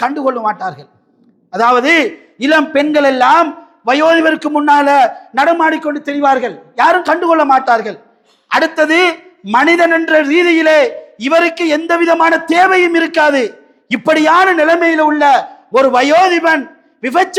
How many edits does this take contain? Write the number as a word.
zero